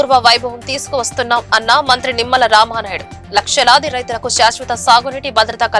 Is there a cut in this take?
no; 0 cuts

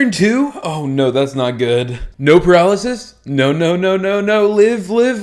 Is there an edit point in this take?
yes; 1 cut; at 2.0 s

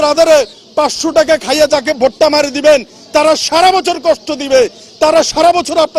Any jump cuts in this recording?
no; 0 cuts

